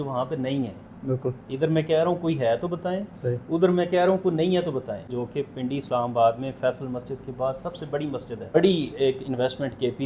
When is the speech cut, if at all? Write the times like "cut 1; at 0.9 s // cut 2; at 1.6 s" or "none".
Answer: cut 1; at 5.1 s // cut 2; at 8.6 s